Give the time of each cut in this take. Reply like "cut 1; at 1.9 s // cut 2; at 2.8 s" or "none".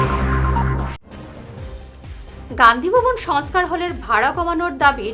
cut 1; at 2.0 s